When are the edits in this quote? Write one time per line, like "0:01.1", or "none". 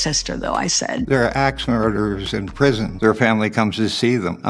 0:01.0